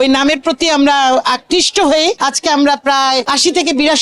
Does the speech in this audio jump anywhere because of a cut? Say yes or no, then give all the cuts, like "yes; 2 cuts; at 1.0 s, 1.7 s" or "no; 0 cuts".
no; 0 cuts